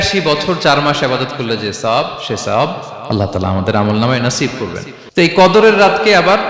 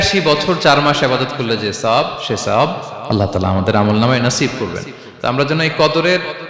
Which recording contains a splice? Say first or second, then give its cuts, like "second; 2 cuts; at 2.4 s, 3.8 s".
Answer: first; 1 cut; at 5.0 s